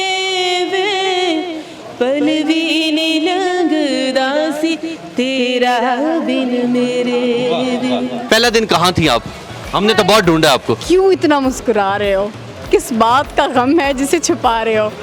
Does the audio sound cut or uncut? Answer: cut